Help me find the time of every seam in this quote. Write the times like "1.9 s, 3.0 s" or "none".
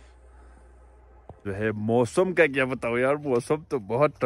1.4 s